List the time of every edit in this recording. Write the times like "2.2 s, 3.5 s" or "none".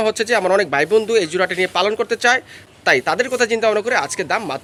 none